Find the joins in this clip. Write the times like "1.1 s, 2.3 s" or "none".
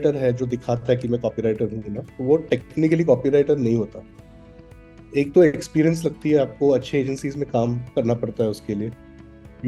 none